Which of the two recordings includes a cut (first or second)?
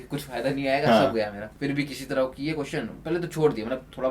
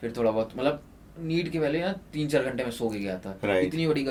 first